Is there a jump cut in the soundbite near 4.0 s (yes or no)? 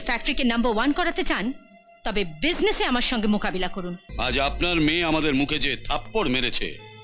yes